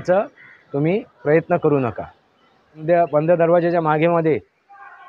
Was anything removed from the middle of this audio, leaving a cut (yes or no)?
yes